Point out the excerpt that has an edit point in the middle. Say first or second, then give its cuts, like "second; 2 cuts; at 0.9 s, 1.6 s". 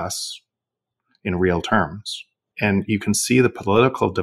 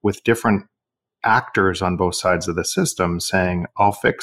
first; 1 cut; at 2.5 s